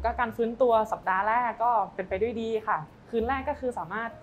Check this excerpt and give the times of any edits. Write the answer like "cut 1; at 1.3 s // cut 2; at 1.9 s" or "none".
cut 1; at 2.9 s